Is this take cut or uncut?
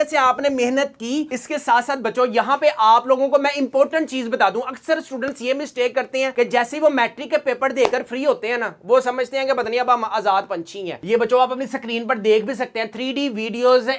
cut